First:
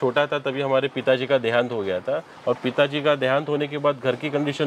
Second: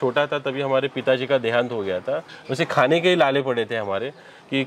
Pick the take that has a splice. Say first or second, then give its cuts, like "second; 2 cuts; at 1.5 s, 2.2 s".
second; 1 cut; at 2.3 s